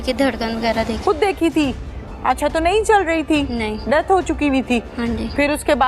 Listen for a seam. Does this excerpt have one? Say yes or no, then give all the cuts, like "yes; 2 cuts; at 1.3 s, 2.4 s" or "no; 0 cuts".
no; 0 cuts